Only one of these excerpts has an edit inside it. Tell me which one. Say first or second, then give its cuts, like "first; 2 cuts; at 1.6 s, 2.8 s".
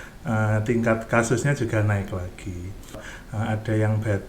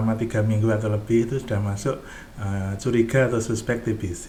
first; 1 cut; at 2.9 s